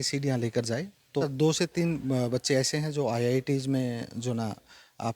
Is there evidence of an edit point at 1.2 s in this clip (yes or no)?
yes